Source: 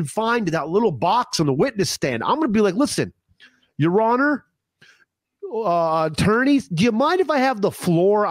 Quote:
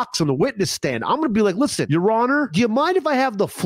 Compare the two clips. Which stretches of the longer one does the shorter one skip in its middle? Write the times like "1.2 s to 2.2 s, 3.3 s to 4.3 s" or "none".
3.0 s to 3.7 s, 4.4 s to 6.7 s